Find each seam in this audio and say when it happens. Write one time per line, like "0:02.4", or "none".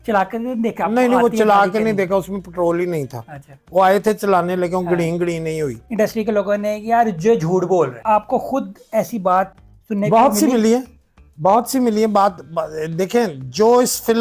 0:05.9
0:08.0